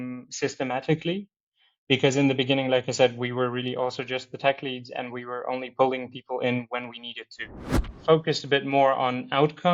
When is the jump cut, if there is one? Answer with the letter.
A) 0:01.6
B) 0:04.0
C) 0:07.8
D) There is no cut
C